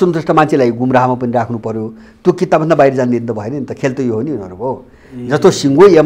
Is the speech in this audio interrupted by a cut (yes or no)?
no